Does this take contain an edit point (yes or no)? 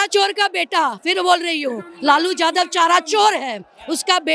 no